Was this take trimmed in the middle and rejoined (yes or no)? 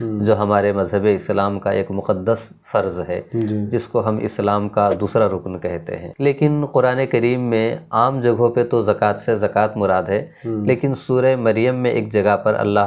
yes